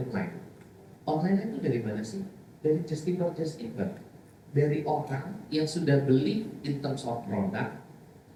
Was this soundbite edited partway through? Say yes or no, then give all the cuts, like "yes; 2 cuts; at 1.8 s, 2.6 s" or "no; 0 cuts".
no; 0 cuts